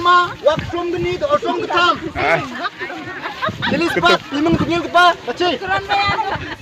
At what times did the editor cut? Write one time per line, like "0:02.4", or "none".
none

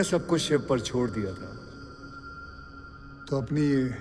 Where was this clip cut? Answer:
none

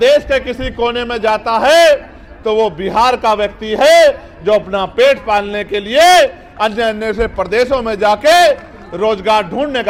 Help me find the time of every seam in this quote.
none

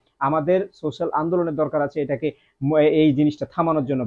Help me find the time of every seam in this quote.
none

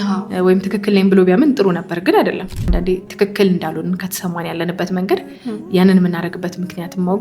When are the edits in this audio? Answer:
0:02.6

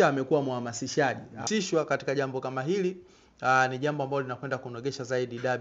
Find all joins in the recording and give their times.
0:01.4

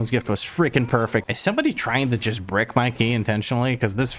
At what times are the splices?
0:01.2

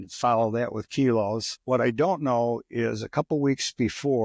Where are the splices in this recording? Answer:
0:01.5

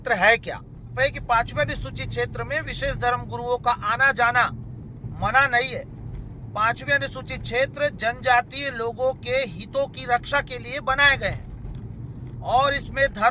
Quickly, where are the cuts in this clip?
0:00.9

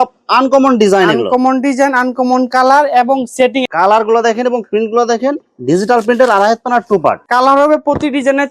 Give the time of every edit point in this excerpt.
0:03.7
0:07.2

